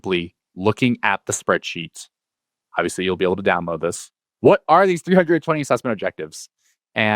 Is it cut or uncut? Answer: cut